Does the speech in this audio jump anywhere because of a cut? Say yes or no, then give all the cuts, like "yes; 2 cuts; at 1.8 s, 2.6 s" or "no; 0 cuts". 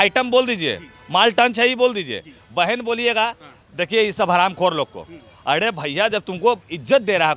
no; 0 cuts